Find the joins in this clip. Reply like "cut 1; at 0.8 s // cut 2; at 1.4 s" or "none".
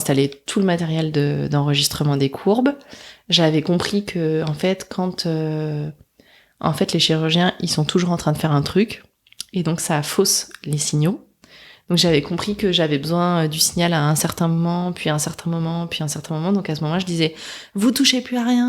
none